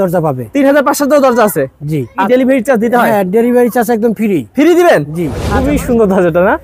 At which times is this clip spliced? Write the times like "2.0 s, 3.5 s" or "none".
2.2 s, 5.4 s